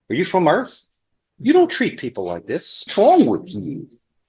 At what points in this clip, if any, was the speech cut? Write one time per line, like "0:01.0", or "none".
0:02.7